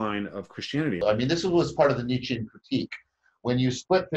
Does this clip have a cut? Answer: yes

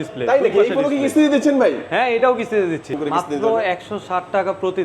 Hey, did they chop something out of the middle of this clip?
yes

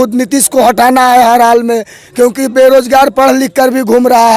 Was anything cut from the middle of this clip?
no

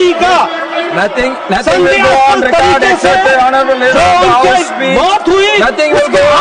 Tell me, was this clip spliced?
no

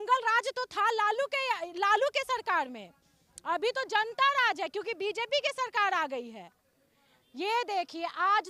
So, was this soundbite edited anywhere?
no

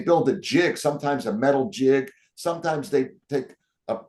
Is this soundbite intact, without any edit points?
yes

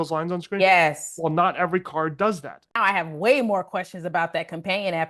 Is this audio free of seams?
no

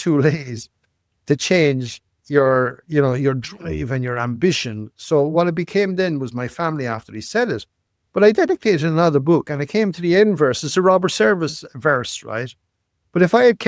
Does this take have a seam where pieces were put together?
no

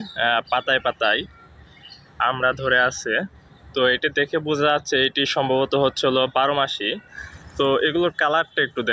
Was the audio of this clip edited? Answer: yes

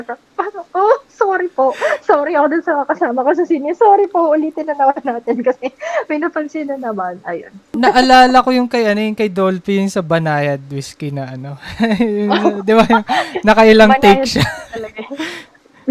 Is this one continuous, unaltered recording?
no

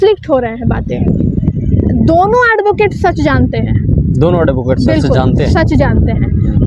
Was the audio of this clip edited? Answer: no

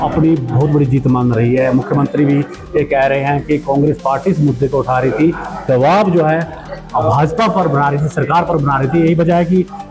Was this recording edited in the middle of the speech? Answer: no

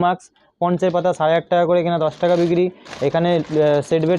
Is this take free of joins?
yes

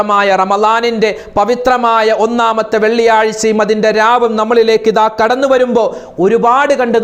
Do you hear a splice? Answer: no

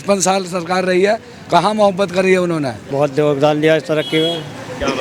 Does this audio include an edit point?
yes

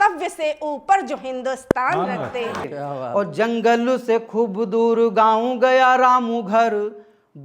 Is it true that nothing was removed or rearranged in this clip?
no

